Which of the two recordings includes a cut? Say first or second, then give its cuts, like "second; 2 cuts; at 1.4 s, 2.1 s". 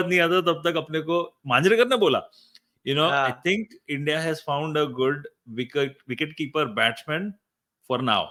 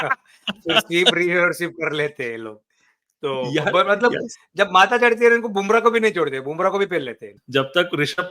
second; 1 cut; at 7.3 s